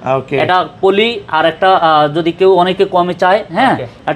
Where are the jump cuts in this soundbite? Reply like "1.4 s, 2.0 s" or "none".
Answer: none